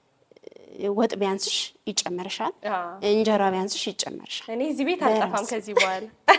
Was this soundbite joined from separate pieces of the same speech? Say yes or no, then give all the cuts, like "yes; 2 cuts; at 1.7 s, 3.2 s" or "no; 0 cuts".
no; 0 cuts